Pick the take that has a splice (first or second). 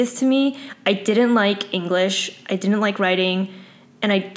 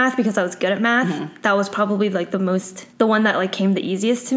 second